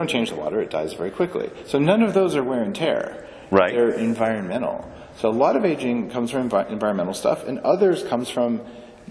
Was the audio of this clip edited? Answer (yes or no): no